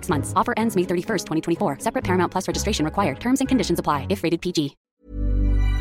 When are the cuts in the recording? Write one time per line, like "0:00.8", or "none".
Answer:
0:04.9